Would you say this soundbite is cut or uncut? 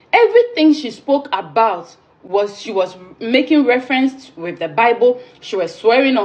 uncut